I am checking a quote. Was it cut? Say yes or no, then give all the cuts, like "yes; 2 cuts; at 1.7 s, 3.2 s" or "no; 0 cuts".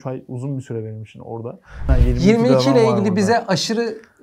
yes; 1 cut; at 1.9 s